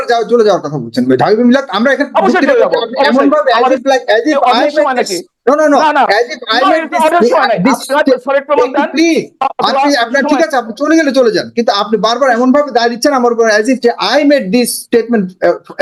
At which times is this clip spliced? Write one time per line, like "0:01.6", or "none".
none